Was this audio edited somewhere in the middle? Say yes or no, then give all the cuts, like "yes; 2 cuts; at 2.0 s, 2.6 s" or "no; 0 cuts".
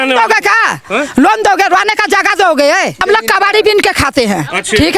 yes; 1 cut; at 3.0 s